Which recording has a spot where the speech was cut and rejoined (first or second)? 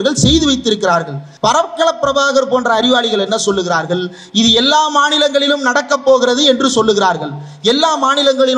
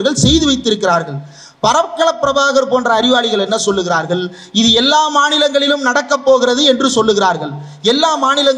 first